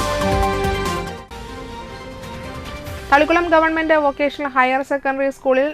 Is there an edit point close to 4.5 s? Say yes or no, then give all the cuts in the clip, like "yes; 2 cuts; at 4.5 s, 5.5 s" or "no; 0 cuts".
no; 0 cuts